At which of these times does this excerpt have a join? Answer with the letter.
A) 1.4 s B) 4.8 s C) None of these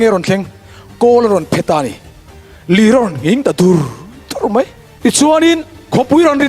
B